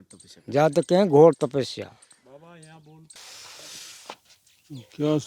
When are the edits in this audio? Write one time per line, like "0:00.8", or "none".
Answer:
0:03.1